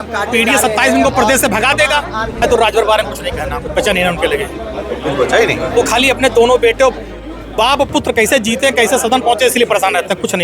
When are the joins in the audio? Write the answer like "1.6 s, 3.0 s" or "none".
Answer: 2.4 s